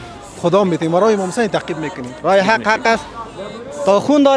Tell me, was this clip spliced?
yes; 1 cut; at 2.2 s

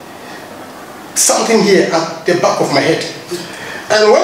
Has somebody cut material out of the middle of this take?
no; 0 cuts

